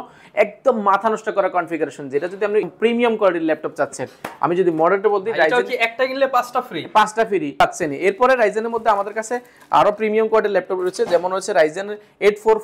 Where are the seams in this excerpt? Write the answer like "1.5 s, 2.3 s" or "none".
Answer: 2.7 s, 7.6 s